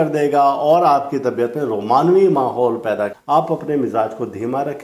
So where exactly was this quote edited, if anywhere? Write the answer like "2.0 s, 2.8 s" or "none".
3.2 s

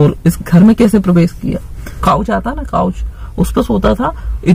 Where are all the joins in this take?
1.9 s

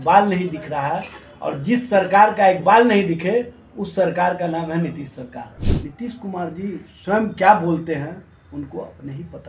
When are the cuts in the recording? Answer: 5.6 s

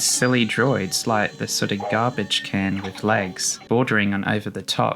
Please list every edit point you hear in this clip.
3.6 s

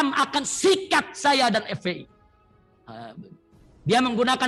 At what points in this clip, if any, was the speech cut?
none

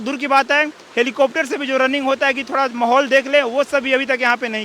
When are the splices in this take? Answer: none

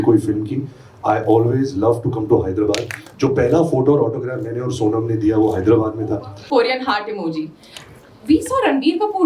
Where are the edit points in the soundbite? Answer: 3.0 s, 6.4 s

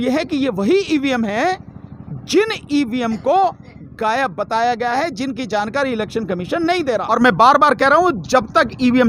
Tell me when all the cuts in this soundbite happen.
7.1 s

